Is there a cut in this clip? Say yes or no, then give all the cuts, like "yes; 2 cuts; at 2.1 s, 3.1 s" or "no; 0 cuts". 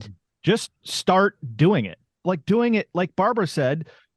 yes; 1 cut; at 2.1 s